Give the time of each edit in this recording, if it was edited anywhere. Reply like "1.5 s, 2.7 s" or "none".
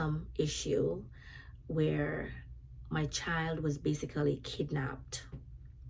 none